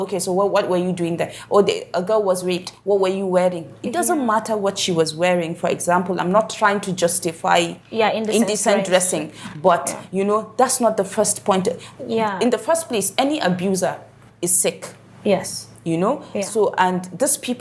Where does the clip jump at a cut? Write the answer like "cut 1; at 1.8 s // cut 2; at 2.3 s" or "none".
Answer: none